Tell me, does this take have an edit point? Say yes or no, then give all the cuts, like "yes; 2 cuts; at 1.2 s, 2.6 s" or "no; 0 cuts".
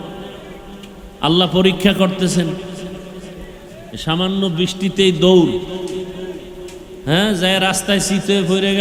no; 0 cuts